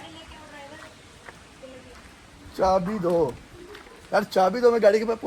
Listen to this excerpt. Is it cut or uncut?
uncut